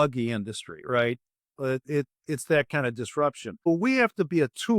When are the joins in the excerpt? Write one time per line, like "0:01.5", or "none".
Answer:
0:03.7